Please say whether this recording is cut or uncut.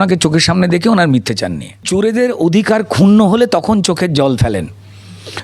cut